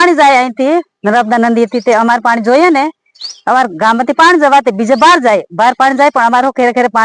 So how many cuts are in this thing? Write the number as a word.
zero